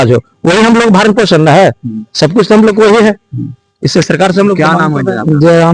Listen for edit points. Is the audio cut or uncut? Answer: uncut